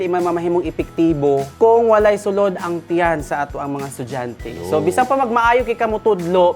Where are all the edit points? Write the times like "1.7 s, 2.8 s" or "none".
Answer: 1.5 s